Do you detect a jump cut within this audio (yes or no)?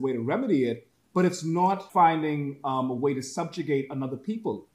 yes